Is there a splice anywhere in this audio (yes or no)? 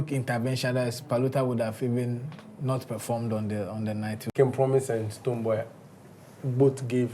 yes